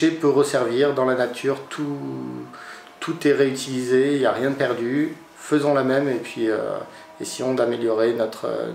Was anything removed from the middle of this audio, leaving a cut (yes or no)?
no